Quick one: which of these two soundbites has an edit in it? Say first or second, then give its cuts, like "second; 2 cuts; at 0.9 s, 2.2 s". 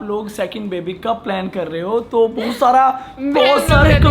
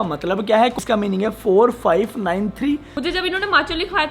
second; 2 cuts; at 0.7 s, 2.9 s